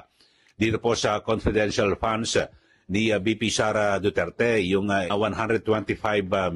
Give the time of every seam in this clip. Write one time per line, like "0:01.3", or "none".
0:05.1